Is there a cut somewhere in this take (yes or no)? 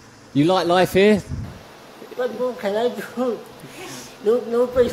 no